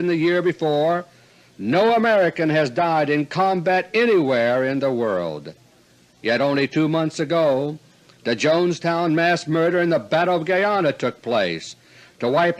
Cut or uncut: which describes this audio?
cut